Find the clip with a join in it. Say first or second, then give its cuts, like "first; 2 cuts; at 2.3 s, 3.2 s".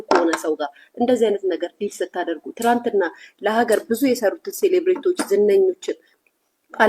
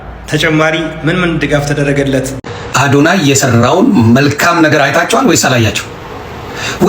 second; 1 cut; at 2.5 s